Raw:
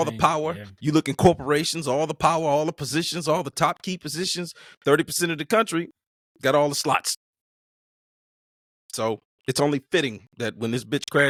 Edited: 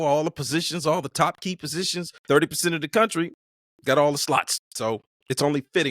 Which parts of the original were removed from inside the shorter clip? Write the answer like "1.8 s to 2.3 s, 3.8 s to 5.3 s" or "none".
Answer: 4.5 s to 4.6 s, 7.2 s to 8.8 s